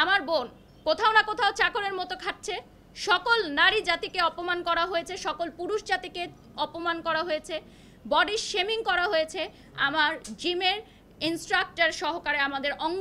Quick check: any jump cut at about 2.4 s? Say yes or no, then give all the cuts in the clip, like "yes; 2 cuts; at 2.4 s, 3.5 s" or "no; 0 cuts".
no; 0 cuts